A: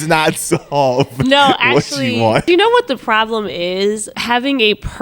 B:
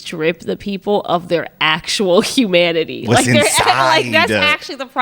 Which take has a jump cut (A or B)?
A